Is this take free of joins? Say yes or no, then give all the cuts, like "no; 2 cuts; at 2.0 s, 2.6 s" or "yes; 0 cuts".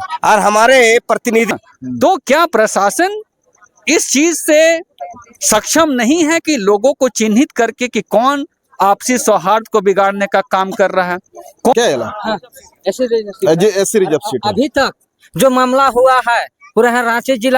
no; 2 cuts; at 1.5 s, 11.7 s